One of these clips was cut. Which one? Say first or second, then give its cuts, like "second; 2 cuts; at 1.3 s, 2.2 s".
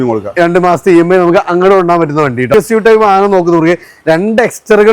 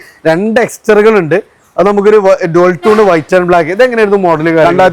first; 1 cut; at 2.5 s